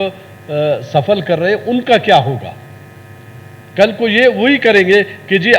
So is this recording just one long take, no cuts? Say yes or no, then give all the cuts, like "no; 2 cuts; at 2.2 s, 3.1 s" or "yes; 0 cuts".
yes; 0 cuts